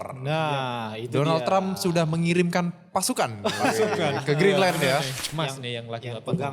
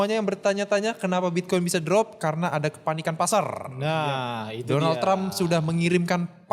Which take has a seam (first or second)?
first